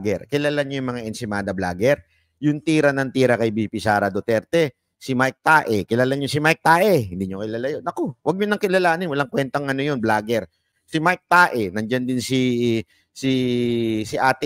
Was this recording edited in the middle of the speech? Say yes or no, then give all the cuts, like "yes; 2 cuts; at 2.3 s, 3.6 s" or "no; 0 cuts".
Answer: no; 0 cuts